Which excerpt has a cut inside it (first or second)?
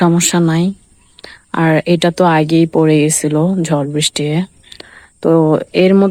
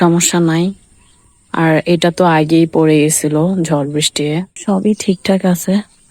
second